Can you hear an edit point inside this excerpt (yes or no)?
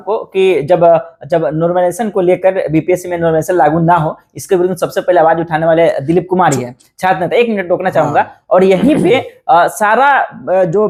no